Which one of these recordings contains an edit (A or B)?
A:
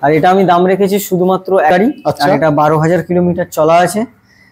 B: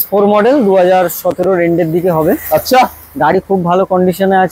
A